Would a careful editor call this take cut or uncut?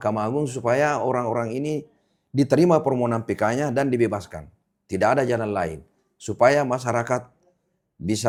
uncut